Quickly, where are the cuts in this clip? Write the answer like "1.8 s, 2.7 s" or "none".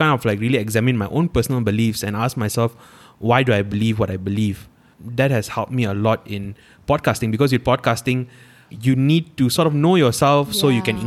4.8 s, 8.7 s